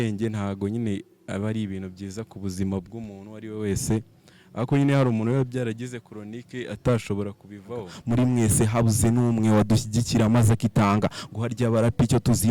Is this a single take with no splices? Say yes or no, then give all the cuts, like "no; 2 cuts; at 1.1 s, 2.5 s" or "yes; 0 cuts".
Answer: no; 1 cut; at 7.9 s